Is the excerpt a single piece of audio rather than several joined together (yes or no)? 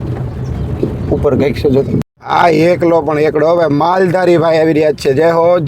no